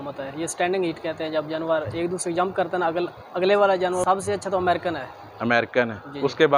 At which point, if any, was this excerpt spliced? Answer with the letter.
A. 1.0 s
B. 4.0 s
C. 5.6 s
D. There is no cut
B